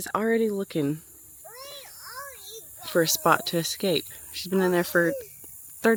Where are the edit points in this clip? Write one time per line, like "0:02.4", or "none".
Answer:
none